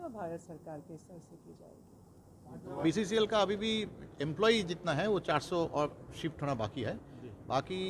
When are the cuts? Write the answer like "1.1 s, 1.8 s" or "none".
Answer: 2.8 s